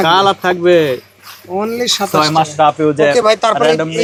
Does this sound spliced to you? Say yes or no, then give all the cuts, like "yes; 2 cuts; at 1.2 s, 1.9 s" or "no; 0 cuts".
no; 0 cuts